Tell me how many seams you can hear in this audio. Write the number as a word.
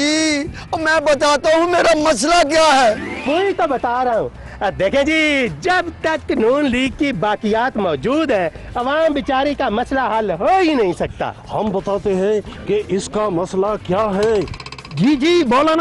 zero